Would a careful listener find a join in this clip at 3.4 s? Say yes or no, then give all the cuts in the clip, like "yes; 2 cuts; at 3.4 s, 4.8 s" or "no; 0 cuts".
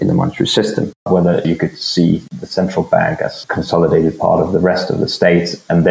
yes; 3 cuts; at 1.1 s, 2.3 s, 3.4 s